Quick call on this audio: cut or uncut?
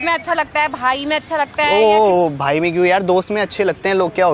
uncut